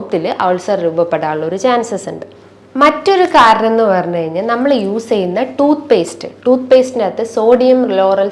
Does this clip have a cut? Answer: no; 0 cuts

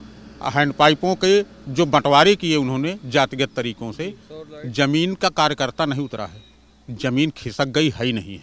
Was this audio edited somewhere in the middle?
no; 0 cuts

